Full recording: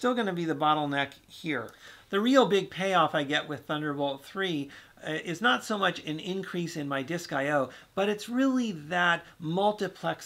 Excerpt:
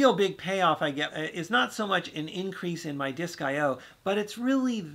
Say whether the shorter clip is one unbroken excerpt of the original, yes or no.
no